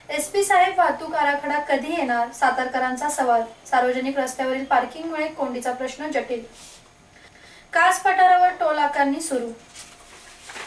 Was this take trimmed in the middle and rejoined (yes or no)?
no